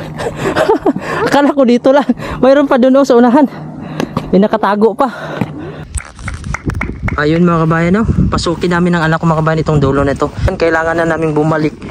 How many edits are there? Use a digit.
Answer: 2